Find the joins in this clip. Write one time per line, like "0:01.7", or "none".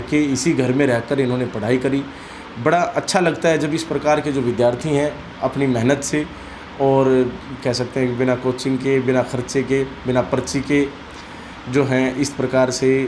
none